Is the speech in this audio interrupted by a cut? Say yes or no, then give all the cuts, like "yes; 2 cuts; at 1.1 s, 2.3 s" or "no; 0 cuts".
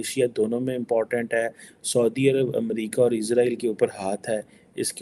no; 0 cuts